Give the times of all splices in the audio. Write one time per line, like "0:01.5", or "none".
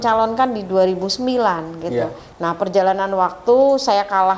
0:02.2